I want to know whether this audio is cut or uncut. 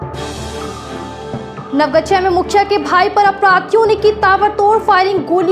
cut